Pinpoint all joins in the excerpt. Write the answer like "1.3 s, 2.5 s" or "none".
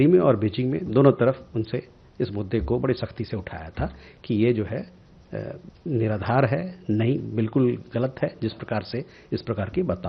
none